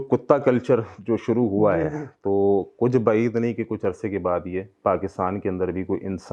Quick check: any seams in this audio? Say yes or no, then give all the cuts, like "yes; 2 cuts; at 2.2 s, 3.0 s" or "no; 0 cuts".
no; 0 cuts